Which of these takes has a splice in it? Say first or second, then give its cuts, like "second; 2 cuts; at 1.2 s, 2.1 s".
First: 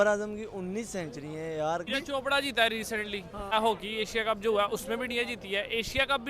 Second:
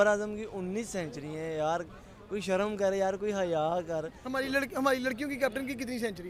first; 2 cuts; at 1.9 s, 3.5 s